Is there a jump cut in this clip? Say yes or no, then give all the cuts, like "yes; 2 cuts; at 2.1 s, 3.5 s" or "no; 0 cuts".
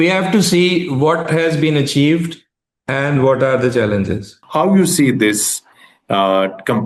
yes; 1 cut; at 4.4 s